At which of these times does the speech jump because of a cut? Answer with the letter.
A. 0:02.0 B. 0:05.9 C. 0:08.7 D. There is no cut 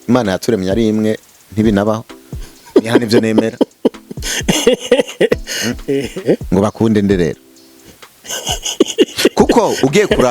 B